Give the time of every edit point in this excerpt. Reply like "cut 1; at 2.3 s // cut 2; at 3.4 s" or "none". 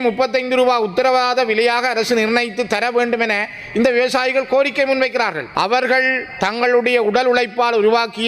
cut 1; at 5.4 s